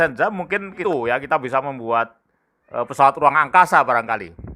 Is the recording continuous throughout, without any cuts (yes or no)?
no